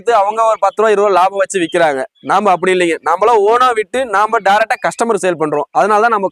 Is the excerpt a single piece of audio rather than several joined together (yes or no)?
yes